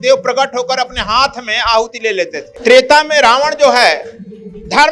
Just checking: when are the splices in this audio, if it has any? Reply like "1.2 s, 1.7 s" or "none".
2.5 s